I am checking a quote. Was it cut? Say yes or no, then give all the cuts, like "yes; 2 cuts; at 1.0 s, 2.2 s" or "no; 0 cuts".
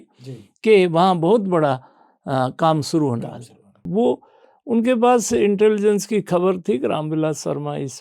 yes; 1 cut; at 3.8 s